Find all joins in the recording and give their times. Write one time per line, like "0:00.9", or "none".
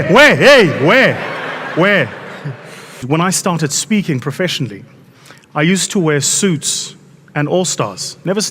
0:03.0